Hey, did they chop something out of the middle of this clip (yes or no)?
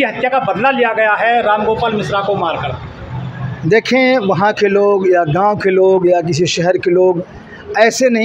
no